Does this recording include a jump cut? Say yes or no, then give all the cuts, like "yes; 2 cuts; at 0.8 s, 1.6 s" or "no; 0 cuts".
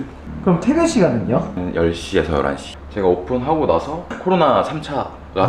yes; 1 cut; at 2.8 s